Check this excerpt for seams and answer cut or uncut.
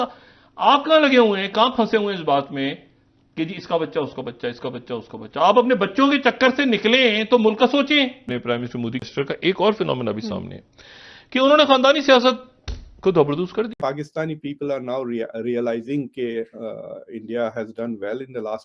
cut